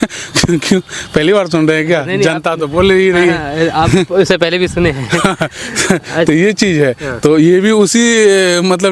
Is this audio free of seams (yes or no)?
yes